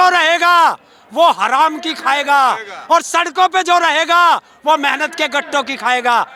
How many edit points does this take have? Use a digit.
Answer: 0